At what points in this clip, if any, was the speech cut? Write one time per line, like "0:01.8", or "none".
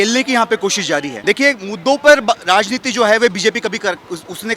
0:01.1